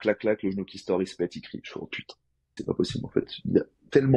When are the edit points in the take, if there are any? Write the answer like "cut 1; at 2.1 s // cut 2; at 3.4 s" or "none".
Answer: cut 1; at 2.6 s